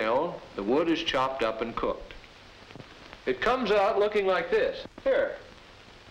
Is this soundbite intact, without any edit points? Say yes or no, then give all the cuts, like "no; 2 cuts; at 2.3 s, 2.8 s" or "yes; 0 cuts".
yes; 0 cuts